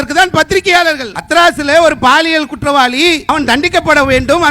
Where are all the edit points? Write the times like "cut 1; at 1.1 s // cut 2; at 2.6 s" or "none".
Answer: cut 1; at 1.1 s // cut 2; at 3.2 s